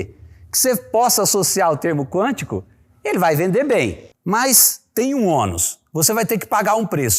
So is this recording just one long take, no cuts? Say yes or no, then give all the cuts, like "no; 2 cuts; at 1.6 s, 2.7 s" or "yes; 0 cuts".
no; 1 cut; at 4.0 s